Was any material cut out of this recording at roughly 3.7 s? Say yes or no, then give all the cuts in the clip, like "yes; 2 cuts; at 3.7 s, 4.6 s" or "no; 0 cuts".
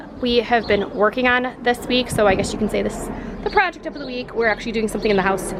no; 0 cuts